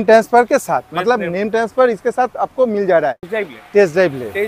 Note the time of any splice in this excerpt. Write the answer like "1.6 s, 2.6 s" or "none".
3.2 s